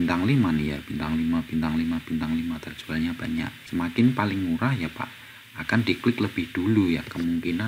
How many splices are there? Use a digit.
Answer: 1